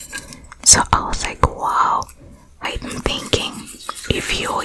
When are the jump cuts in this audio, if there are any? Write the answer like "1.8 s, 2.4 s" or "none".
2.6 s